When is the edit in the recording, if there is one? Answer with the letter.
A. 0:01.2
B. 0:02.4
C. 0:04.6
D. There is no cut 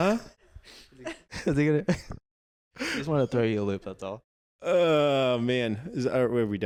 D